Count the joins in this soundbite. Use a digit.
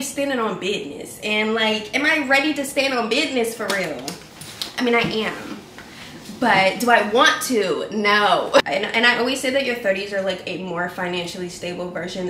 0